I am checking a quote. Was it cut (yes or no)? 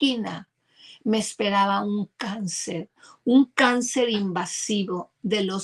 no